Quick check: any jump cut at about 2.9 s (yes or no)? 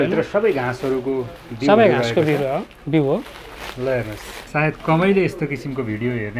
no